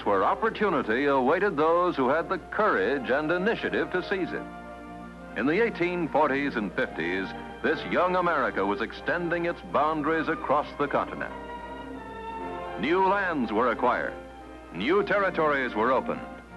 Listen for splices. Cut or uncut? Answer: cut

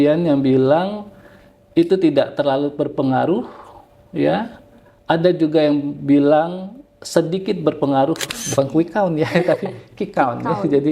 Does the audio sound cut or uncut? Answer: cut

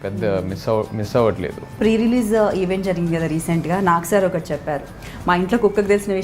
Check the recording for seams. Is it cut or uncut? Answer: cut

